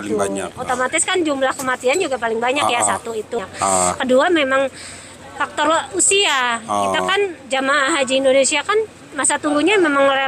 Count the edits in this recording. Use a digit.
1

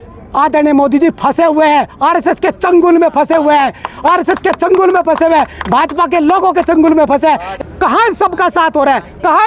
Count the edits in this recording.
1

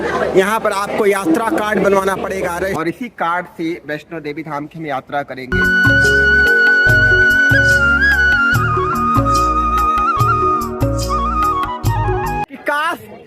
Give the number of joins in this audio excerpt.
3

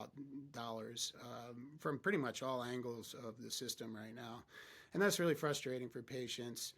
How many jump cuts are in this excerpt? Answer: 0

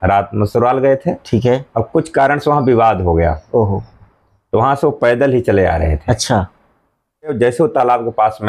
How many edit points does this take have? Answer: 1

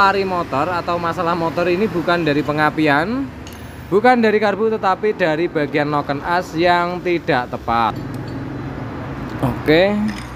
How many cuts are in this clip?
1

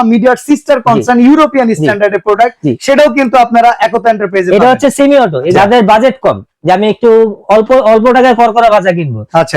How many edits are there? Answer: 1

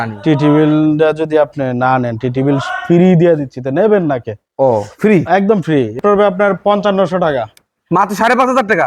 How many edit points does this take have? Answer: 1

